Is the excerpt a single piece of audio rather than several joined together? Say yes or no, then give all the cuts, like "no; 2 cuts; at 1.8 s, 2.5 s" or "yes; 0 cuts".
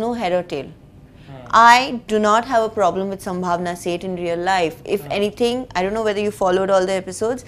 yes; 0 cuts